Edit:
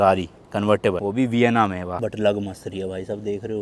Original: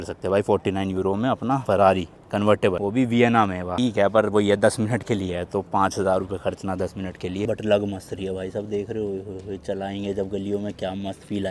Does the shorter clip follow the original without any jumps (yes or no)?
no